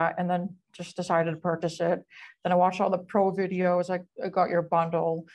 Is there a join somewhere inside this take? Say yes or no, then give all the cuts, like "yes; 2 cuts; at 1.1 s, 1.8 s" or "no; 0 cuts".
no; 0 cuts